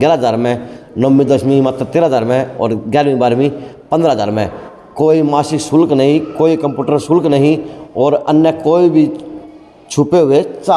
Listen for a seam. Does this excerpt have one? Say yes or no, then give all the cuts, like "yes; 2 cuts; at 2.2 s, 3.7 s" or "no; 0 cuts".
no; 0 cuts